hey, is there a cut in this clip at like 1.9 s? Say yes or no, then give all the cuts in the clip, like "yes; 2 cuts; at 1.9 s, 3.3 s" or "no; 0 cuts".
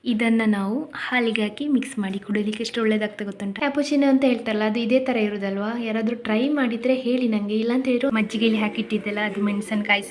no; 2 cuts; at 3.5 s, 8.0 s